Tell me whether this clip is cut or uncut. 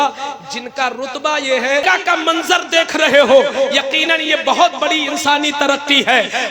cut